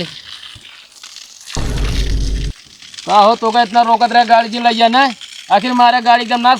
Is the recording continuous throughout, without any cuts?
no; 2 cuts; at 1.5 s, 2.5 s

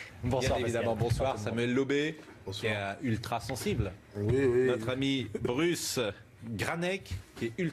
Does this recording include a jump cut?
yes; 1 cut; at 2.2 s

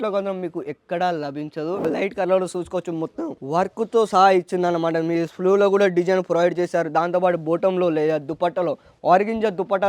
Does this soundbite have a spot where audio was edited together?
yes; 1 cut; at 1.8 s

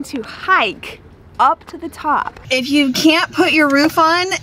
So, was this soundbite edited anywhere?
yes; 1 cut; at 2.4 s

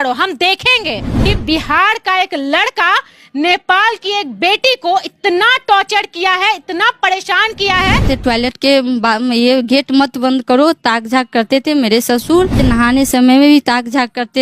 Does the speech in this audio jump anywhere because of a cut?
yes; 3 cuts; at 1.2 s, 8.1 s, 12.6 s

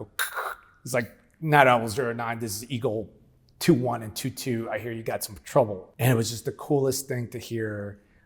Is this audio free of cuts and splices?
no; 1 cut; at 5.8 s

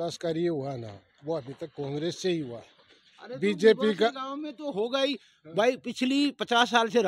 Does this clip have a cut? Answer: no; 0 cuts

